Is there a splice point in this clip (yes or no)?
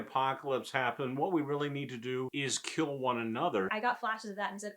yes